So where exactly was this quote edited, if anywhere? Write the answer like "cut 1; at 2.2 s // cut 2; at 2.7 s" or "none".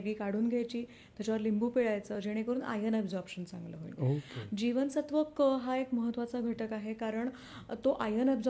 none